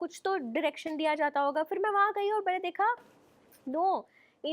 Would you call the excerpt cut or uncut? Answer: uncut